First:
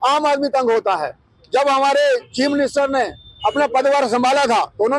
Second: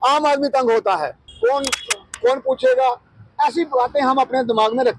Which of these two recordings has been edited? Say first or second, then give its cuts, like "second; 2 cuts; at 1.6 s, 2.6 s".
second; 1 cut; at 1.2 s